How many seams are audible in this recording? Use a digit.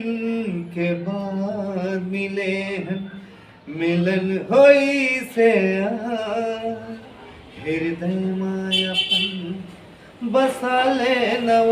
0